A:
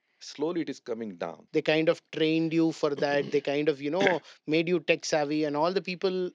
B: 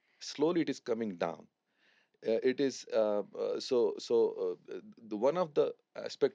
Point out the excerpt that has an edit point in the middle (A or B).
A